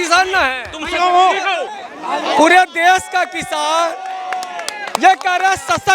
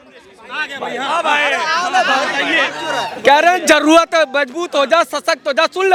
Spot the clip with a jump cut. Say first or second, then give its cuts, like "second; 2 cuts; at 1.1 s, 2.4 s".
first; 1 cut; at 1.7 s